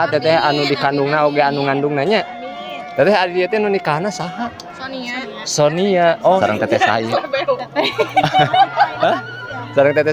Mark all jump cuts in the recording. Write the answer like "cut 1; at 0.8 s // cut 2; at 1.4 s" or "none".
cut 1; at 6.4 s